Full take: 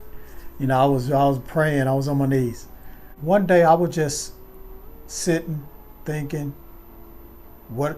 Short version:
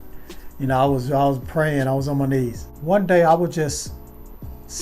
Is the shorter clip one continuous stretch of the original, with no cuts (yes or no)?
no